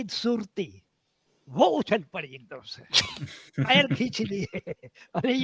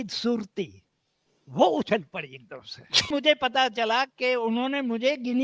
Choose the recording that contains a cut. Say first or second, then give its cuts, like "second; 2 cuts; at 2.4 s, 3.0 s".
second; 1 cut; at 3.1 s